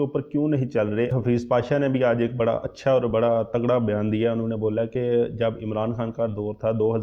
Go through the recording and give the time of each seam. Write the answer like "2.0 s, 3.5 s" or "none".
1.1 s